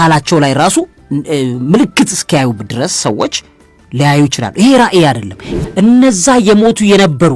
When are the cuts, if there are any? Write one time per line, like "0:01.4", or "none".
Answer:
0:05.5